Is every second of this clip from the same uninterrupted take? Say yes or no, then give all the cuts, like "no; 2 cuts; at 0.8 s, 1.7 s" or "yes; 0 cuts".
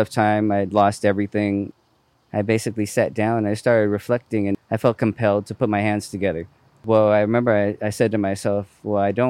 no; 3 cuts; at 1.7 s, 4.6 s, 6.8 s